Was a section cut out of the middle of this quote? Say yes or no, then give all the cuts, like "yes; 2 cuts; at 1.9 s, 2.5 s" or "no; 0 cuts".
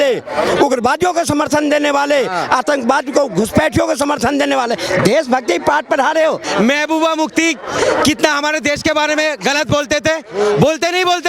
yes; 1 cut; at 6.4 s